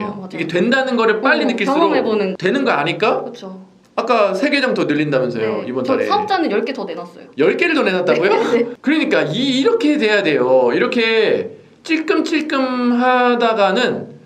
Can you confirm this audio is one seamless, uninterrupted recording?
no; 2 cuts; at 2.3 s, 8.7 s

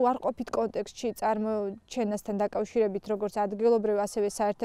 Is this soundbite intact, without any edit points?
yes; 0 cuts

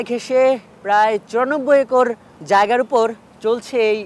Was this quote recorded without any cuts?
no; 1 cut; at 2.3 s

